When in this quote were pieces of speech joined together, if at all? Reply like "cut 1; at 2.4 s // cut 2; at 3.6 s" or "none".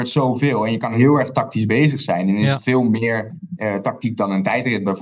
cut 1; at 1.0 s // cut 2; at 3.5 s